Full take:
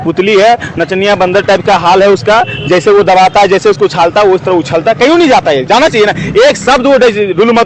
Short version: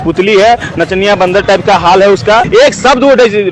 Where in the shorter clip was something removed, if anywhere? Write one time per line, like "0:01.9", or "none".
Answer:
0:02.5

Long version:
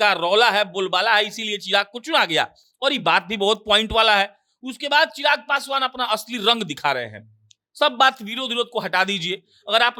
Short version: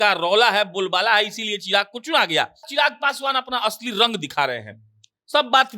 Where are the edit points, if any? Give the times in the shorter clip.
0:02.7

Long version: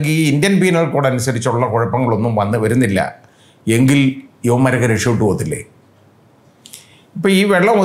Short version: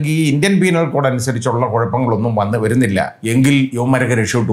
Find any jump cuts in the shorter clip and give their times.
0:03.2
0:03.8

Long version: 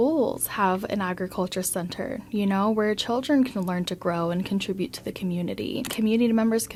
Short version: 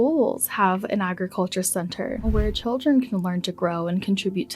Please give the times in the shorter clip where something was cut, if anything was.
0:02.3

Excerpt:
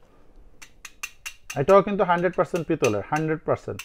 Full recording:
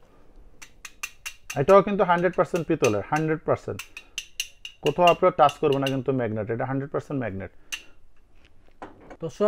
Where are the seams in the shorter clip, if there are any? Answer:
none

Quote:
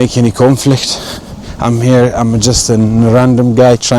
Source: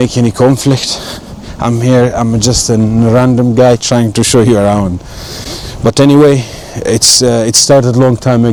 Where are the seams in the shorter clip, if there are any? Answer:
none

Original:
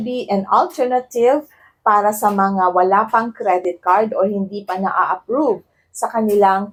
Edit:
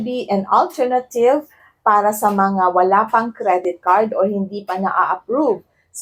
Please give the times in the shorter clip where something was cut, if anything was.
none

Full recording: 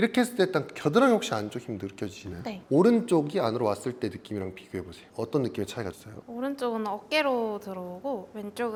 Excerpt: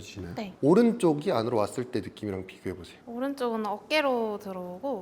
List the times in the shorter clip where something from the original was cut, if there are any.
0:02.9

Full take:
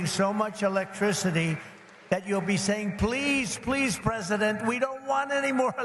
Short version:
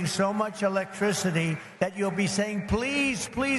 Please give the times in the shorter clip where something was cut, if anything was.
0:01.6

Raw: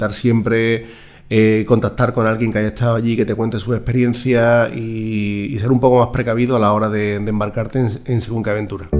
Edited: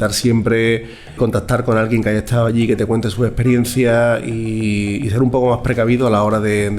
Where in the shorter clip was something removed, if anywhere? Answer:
0:01.2

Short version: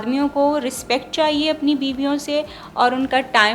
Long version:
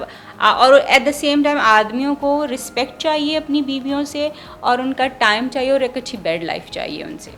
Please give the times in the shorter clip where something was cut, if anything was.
none

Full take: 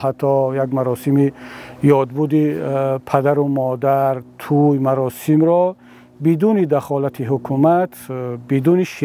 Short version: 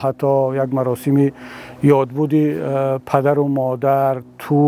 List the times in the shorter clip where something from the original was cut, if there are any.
none

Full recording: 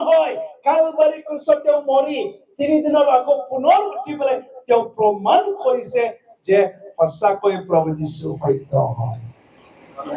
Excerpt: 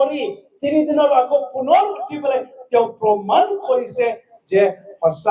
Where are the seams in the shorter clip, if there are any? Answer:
none

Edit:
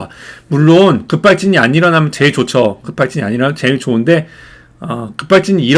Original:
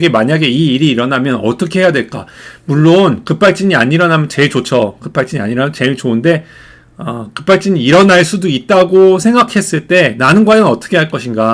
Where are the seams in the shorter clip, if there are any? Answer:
none

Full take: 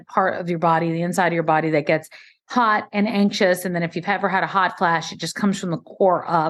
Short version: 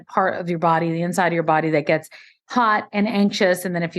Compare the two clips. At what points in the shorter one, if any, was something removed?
none

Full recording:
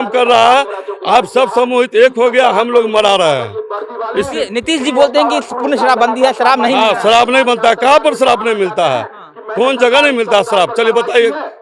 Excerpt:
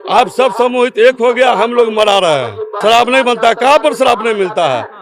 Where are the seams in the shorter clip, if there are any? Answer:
0:02.8

